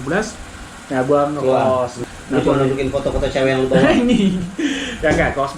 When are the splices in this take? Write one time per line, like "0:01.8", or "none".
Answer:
0:02.0